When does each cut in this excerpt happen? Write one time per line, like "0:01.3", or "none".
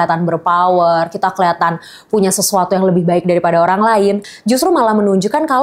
0:04.3